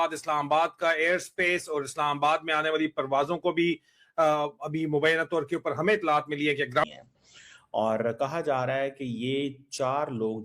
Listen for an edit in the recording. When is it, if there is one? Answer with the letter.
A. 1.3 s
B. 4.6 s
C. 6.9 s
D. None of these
C